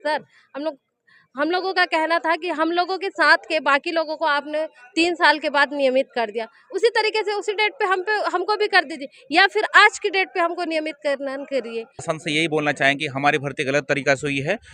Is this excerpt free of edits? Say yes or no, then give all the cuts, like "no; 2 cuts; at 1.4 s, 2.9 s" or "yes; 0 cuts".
no; 1 cut; at 12.1 s